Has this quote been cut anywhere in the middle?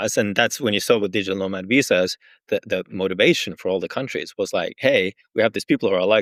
no; 0 cuts

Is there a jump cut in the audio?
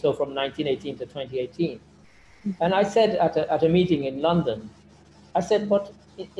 no; 0 cuts

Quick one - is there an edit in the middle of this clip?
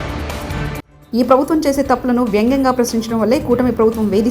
yes; 1 cut; at 0.9 s

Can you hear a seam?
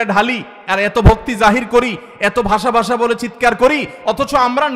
no; 0 cuts

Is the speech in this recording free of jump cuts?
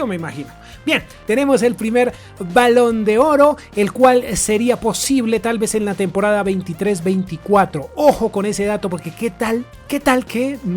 no; 1 cut; at 1.1 s

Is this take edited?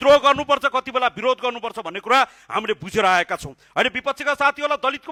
no; 0 cuts

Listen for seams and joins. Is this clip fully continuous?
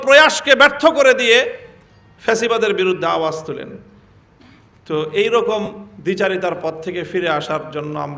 yes; 0 cuts

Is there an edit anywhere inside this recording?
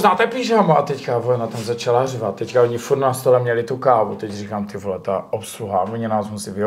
no; 0 cuts

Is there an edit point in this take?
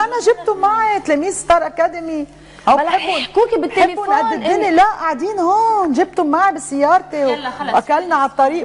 yes; 1 cut; at 7.2 s

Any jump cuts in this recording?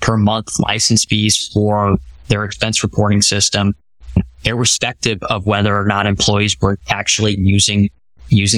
yes; 1 cut; at 4.2 s

